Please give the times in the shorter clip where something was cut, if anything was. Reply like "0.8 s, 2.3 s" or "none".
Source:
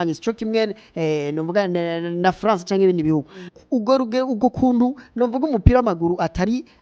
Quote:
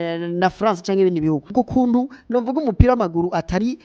1.5 s